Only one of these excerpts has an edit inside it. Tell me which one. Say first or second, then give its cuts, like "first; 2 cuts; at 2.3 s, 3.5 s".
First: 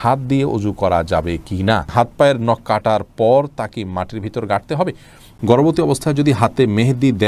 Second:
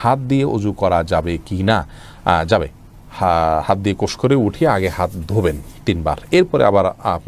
first; 2 cuts; at 1.9 s, 5.2 s